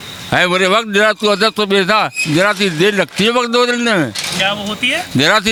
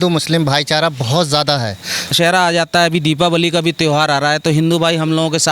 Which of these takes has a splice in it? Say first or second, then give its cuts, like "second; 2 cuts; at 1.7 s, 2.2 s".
second; 1 cut; at 2.1 s